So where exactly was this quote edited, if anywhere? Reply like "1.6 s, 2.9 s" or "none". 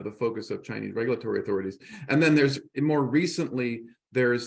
none